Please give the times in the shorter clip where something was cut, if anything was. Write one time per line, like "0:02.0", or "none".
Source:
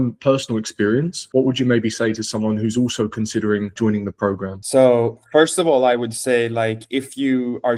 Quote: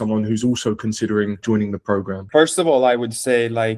0:02.2